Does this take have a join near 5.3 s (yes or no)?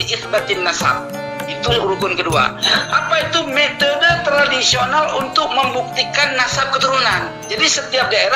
no